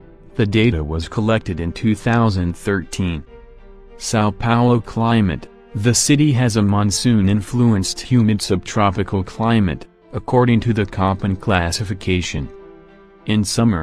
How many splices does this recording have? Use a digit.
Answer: 1